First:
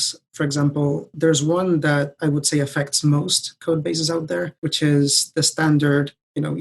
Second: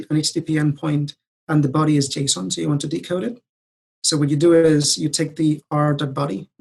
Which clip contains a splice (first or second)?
first